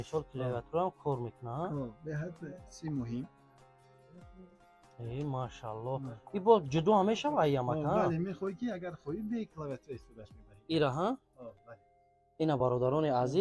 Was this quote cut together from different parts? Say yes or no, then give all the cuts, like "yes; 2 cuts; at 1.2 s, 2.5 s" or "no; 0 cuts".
no; 0 cuts